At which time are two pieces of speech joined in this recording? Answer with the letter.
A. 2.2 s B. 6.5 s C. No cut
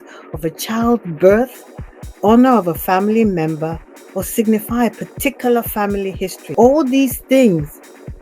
B